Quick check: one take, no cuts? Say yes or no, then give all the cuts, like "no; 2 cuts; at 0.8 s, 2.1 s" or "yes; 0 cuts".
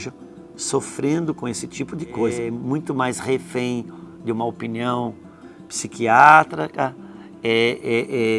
no; 1 cut; at 2.4 s